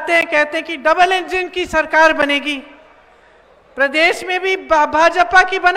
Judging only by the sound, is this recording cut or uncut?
uncut